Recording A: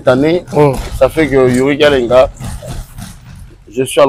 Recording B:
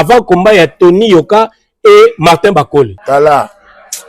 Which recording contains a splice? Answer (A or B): B